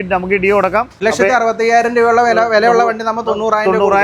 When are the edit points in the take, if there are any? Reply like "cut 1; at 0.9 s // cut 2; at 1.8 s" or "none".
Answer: cut 1; at 0.9 s

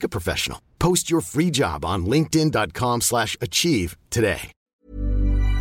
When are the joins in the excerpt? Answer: cut 1; at 4.6 s

